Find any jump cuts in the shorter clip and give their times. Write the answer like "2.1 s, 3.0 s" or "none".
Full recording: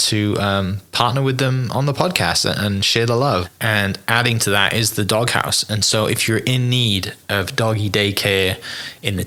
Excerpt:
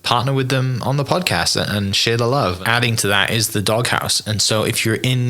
2.6 s

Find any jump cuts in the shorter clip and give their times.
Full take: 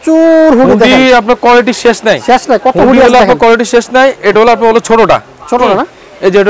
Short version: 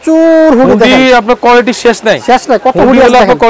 none

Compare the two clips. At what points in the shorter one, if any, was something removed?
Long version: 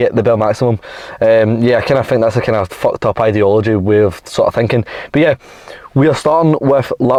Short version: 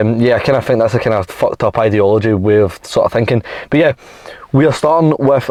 none

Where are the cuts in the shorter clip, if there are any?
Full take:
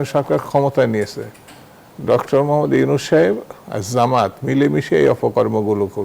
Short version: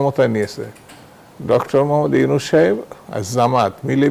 none

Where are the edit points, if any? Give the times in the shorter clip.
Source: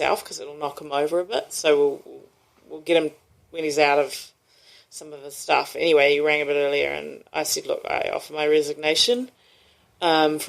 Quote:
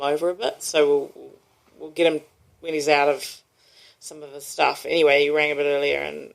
none

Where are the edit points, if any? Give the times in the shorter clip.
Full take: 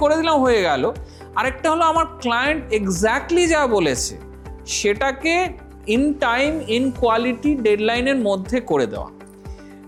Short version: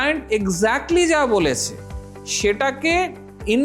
none

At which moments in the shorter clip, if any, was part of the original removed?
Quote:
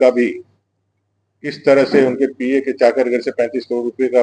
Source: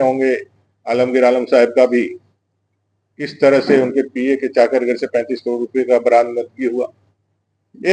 none

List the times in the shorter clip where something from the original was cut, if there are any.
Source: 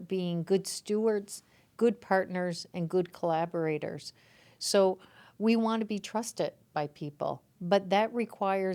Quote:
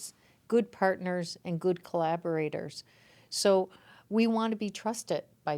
none

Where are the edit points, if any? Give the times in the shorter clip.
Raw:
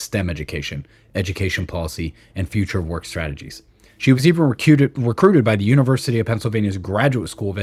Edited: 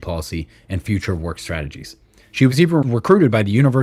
2.9 s

